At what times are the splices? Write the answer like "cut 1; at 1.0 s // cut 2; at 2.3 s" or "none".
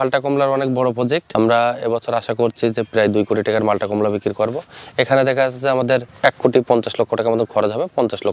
none